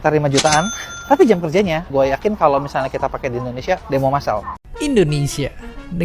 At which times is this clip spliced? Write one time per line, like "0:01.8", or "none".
0:04.5

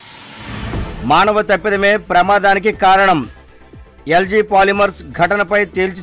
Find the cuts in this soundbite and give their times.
0:01.0

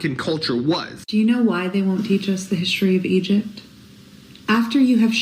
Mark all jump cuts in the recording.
0:01.0

